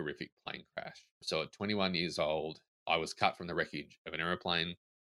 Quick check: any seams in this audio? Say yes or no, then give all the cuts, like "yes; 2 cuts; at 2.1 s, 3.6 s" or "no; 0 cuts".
yes; 1 cut; at 2.9 s